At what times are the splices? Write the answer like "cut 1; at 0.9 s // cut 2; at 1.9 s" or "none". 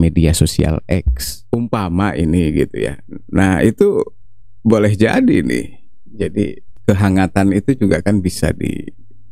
cut 1; at 1.3 s